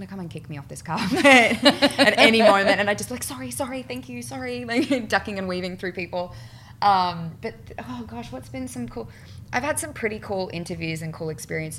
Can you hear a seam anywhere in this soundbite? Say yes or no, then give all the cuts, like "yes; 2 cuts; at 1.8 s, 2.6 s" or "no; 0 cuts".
no; 0 cuts